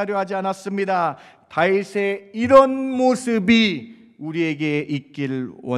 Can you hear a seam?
no; 0 cuts

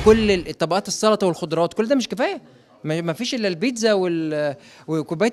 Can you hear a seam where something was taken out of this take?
no; 0 cuts

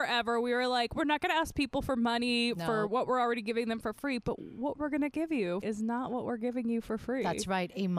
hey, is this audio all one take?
no; 1 cut; at 5.6 s

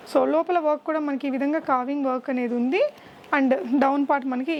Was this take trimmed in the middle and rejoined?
no; 0 cuts

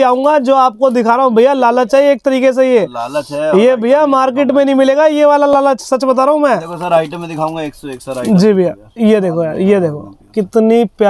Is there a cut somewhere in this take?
no; 0 cuts

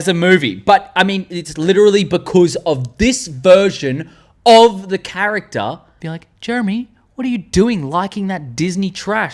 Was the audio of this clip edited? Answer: yes; 1 cut; at 5.9 s

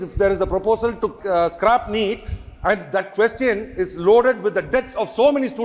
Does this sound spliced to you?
no; 0 cuts

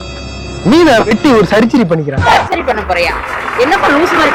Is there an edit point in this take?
no; 0 cuts

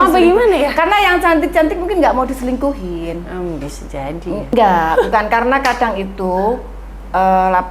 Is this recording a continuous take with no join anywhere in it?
no; 1 cut; at 4.5 s

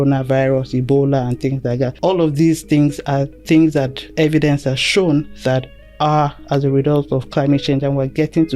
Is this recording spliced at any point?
yes; 1 cut; at 2.0 s

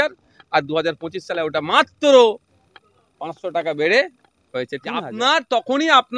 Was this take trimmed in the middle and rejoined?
yes; 1 cut; at 5.1 s

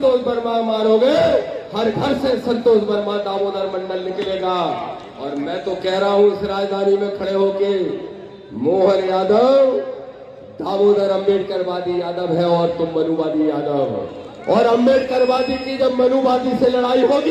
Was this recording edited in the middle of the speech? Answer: no; 0 cuts

